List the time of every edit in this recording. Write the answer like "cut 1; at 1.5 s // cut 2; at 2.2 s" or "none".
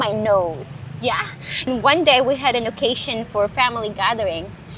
cut 1; at 1.7 s